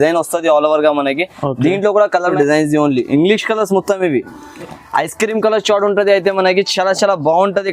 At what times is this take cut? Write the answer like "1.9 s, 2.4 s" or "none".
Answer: 2.3 s